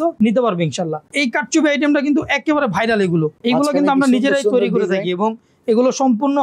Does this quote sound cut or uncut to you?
cut